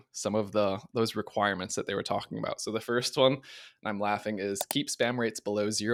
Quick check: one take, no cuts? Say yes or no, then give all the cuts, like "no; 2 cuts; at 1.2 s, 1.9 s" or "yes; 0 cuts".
yes; 0 cuts